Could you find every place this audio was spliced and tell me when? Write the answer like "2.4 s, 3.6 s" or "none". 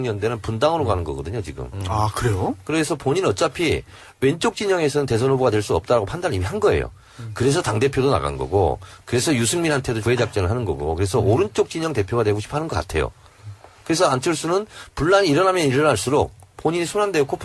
9.5 s